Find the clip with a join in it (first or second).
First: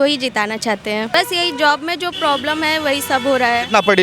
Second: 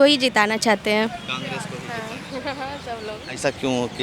first